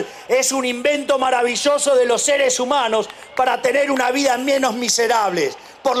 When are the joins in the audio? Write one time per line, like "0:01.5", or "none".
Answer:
none